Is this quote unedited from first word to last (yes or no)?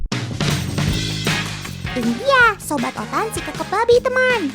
no